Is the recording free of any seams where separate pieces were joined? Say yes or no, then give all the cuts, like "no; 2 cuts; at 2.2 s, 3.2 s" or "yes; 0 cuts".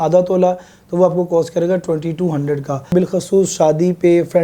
no; 1 cut; at 2.9 s